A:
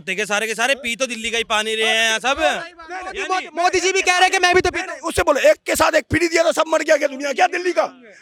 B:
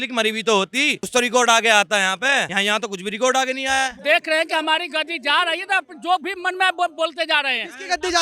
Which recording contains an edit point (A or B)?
B